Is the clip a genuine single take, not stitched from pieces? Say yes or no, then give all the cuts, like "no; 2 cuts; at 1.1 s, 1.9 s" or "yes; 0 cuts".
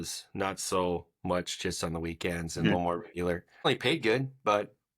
no; 1 cut; at 3.7 s